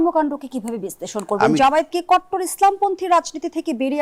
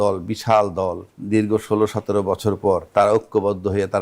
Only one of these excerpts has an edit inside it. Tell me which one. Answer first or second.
second